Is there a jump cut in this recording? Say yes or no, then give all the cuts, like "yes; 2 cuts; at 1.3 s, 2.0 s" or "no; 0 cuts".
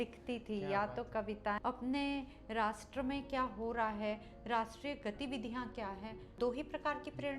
yes; 2 cuts; at 1.6 s, 6.3 s